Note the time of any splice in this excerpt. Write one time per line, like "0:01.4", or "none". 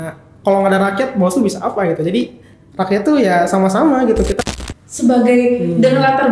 0:04.4